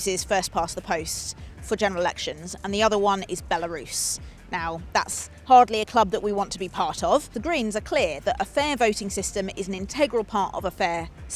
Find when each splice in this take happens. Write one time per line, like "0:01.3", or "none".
0:07.3